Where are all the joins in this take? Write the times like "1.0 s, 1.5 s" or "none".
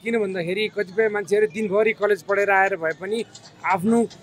none